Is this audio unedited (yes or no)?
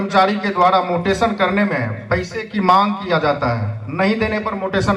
yes